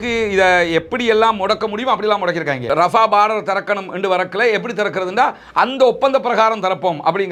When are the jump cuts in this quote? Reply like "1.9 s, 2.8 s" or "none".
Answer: none